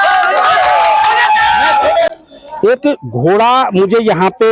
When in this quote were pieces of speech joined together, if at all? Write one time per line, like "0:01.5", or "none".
none

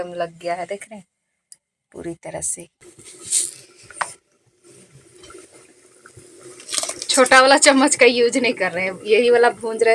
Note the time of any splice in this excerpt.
0:02.7

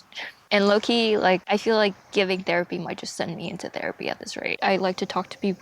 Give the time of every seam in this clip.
0:04.5

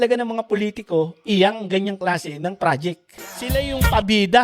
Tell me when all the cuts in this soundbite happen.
0:03.4

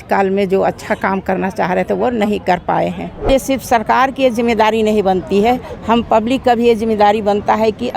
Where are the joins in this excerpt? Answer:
0:03.2

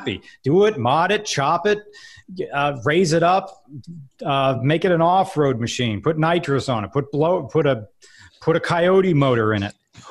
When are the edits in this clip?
none

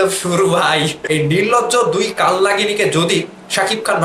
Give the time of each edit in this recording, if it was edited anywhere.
0:01.0

